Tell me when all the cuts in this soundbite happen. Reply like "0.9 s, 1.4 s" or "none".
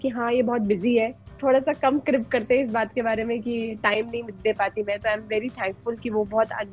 1.3 s